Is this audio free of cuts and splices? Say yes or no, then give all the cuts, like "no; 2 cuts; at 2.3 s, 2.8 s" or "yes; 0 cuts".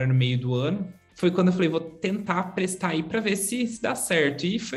no; 1 cut; at 1.0 s